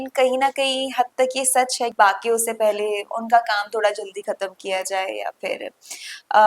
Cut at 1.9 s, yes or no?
yes